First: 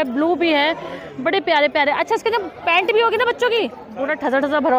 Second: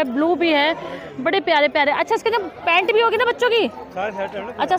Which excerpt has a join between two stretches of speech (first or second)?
first